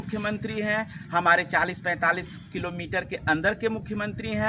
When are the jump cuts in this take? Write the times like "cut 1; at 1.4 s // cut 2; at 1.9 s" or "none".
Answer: none